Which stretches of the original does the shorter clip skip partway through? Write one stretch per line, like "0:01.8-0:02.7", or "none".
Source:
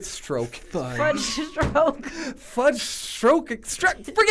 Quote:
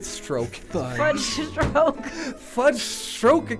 none